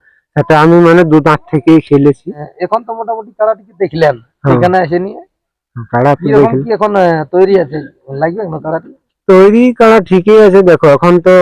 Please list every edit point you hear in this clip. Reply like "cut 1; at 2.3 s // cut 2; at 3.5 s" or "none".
none